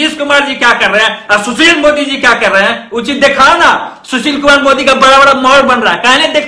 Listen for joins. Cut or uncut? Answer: uncut